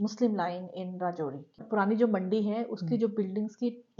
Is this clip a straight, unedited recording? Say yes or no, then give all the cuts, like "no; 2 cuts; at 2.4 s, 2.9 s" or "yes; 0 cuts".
no; 1 cut; at 1.6 s